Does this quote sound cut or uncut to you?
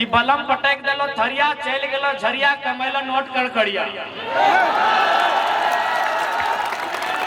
uncut